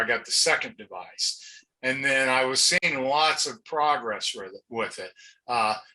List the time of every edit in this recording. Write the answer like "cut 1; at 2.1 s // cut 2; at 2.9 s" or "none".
cut 1; at 2.8 s

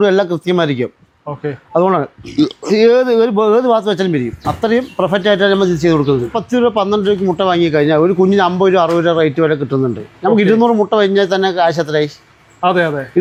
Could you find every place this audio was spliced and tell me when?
none

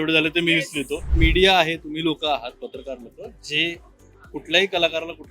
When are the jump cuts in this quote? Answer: cut 1; at 1.1 s

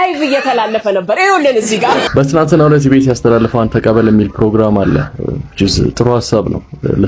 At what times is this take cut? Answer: cut 1; at 2.1 s

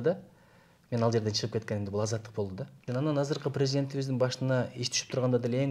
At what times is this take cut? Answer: cut 1; at 2.8 s

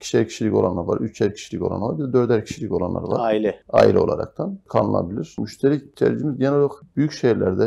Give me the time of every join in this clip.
cut 1; at 3.6 s // cut 2; at 4.7 s // cut 3; at 5.7 s // cut 4; at 6.8 s

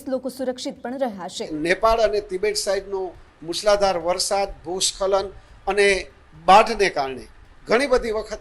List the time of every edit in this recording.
cut 1; at 1.5 s

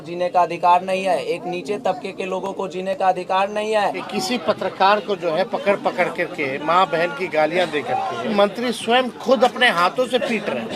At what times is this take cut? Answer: cut 1; at 4.0 s // cut 2; at 8.3 s

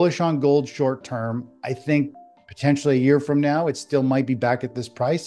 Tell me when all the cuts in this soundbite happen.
none

